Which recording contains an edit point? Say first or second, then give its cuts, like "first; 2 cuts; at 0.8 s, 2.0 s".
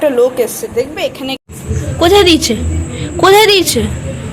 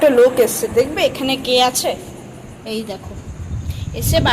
first; 1 cut; at 1.4 s